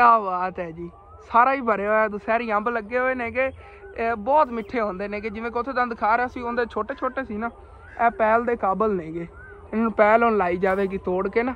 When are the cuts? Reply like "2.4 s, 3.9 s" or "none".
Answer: none